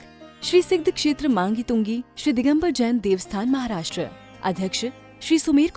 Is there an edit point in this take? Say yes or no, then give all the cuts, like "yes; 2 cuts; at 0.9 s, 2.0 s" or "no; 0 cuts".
no; 0 cuts